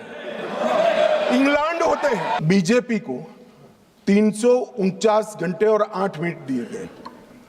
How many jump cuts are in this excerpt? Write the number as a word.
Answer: one